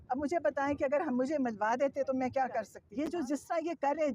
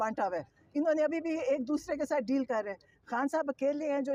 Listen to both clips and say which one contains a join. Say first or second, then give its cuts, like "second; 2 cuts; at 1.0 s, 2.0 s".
first; 1 cut; at 2.8 s